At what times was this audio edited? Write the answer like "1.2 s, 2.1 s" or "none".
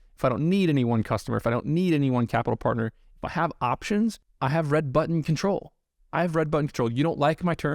4.3 s